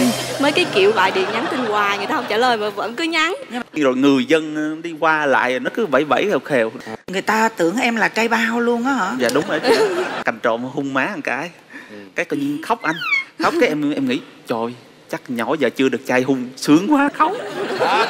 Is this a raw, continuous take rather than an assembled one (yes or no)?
no